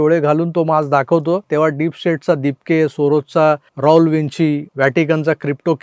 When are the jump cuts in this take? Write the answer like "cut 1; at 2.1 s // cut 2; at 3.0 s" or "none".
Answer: cut 1; at 1.4 s // cut 2; at 3.7 s // cut 3; at 4.7 s

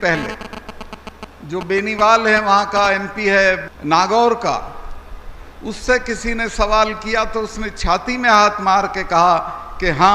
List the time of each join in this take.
cut 1; at 3.7 s

